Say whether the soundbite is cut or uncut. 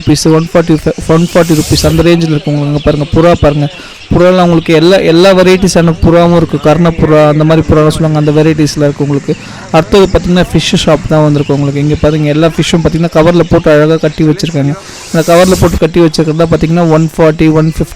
uncut